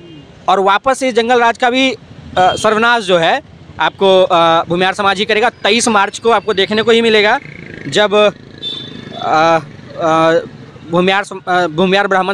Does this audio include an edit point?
no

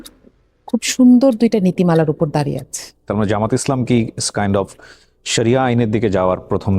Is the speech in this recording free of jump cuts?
no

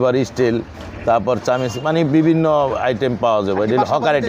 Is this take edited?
no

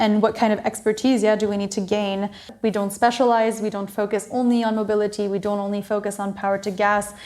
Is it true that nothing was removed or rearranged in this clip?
no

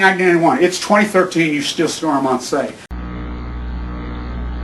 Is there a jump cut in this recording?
yes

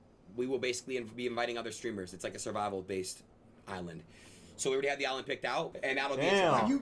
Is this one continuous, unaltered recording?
no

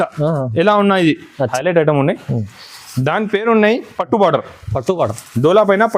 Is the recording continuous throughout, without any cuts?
no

